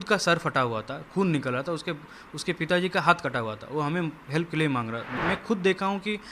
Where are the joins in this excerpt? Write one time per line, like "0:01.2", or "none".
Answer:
0:05.2